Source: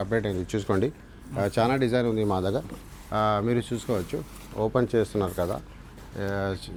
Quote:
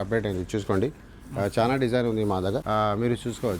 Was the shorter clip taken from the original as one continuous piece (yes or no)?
no